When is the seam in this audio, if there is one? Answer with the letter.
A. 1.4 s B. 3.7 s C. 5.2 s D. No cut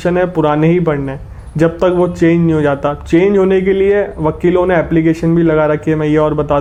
D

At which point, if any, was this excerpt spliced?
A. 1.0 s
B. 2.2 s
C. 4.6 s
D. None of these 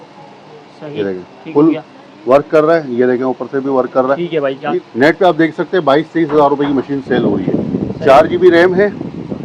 C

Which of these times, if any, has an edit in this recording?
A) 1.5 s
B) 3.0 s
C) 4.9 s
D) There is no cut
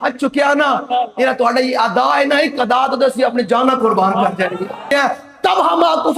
C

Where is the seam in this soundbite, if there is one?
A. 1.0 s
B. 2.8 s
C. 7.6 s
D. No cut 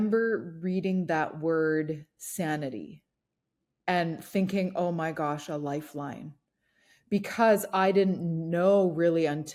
D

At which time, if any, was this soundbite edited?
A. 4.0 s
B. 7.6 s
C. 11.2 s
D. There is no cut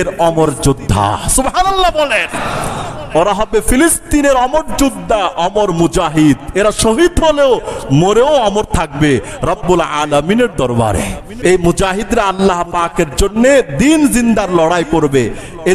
C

